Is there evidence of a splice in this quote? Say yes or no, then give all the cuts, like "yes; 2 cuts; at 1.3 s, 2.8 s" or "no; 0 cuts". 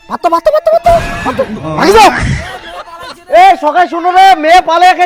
no; 0 cuts